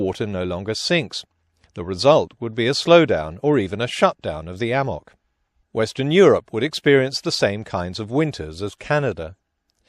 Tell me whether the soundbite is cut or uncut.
cut